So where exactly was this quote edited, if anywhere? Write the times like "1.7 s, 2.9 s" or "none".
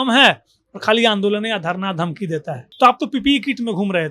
2.6 s